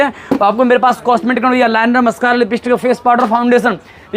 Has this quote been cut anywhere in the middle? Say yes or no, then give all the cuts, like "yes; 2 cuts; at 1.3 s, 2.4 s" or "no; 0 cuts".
no; 0 cuts